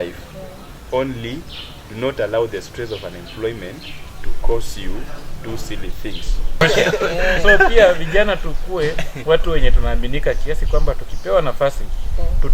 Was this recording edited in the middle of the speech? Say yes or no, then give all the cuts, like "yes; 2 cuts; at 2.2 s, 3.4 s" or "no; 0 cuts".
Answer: yes; 1 cut; at 6.6 s